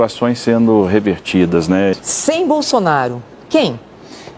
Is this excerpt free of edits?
no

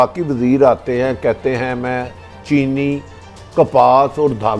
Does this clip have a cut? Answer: no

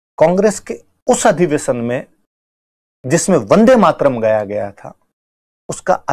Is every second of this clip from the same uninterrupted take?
yes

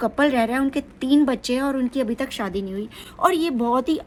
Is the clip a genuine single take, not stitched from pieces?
yes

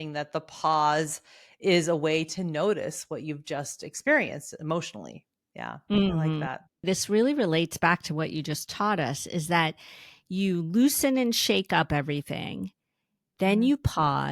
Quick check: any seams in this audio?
yes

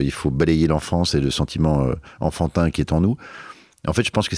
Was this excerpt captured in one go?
yes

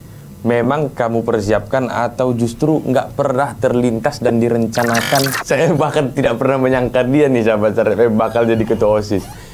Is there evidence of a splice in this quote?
yes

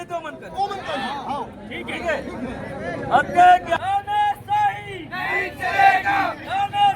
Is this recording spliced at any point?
yes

